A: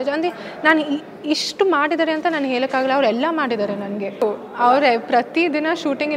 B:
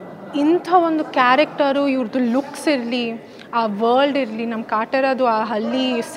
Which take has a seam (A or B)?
A